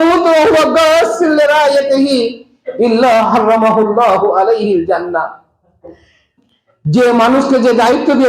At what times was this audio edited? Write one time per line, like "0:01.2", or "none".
0:06.3

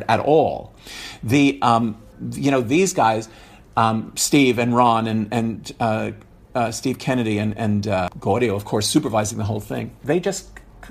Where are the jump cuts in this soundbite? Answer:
0:08.1
0:09.9

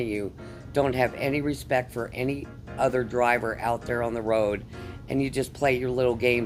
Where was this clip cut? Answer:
none

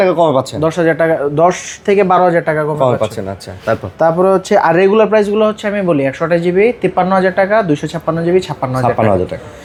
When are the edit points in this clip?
none

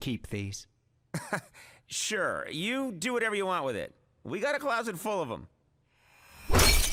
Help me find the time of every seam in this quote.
none

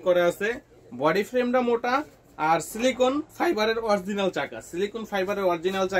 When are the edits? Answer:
none

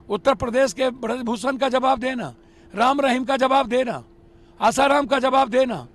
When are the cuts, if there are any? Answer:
none

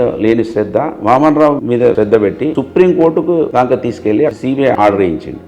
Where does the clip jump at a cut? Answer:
0:02.1
0:03.5
0:04.5

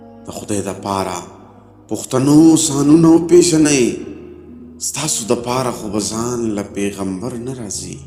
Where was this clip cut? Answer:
none

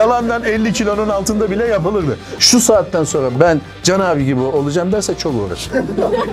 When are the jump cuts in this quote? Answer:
0:02.4

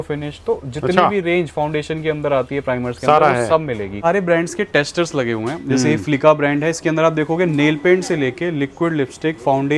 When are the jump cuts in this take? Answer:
0:04.0

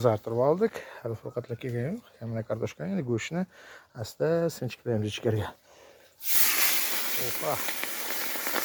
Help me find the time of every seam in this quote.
none

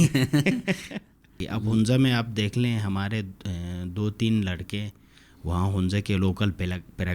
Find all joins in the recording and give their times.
0:01.5

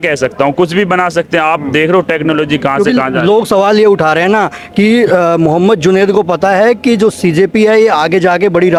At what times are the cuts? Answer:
none

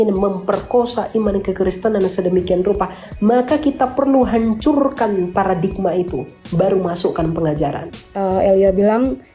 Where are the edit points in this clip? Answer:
0:08.0

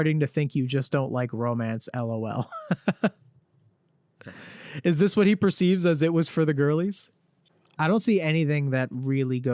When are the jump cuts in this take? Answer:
none

